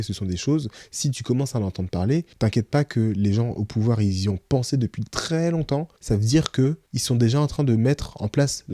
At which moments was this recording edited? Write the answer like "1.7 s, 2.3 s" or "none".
2.3 s, 5.9 s, 6.9 s